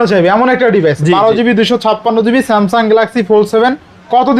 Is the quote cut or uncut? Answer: uncut